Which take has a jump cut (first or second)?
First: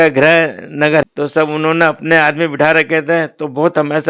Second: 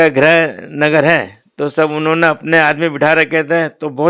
first